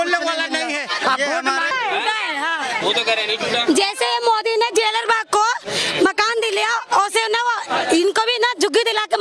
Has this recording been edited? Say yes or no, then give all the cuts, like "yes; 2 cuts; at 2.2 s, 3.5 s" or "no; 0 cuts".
yes; 1 cut; at 1.7 s